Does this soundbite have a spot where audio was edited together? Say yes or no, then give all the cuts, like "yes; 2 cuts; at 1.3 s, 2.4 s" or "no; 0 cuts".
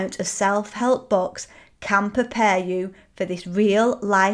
no; 0 cuts